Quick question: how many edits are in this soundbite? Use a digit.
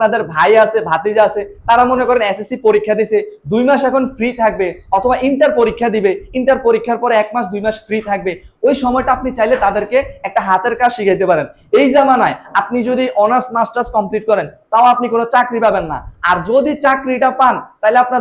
0